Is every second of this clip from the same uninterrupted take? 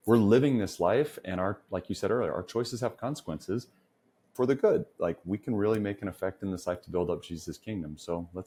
yes; 0 cuts

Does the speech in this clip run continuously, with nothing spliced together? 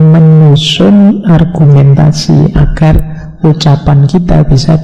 yes; 0 cuts

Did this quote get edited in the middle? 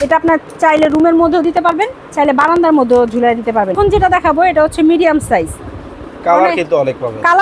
yes; 1 cut; at 3.7 s

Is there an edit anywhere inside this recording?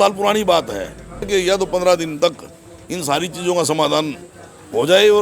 yes; 1 cut; at 1.2 s

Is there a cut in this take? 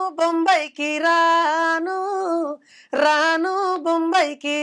no; 0 cuts

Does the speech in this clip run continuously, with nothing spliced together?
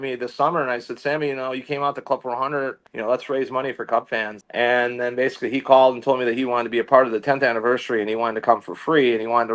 no; 2 cuts; at 2.9 s, 4.4 s

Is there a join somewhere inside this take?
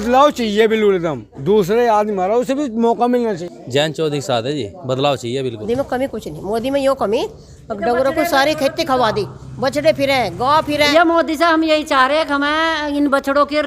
yes; 3 cuts; at 3.4 s, 5.9 s, 10.9 s

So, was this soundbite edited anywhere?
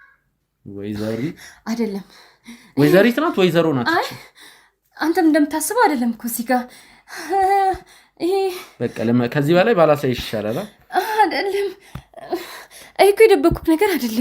no; 0 cuts

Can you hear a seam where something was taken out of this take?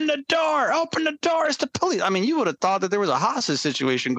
no; 0 cuts

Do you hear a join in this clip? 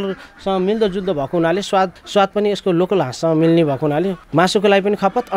no; 0 cuts

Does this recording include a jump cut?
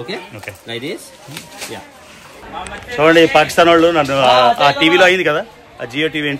yes; 1 cut; at 2.5 s

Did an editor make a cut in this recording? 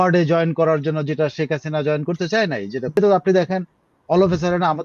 yes; 1 cut; at 3.0 s

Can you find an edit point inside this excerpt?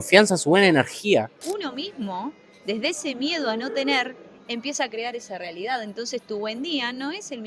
yes; 1 cut; at 1.5 s

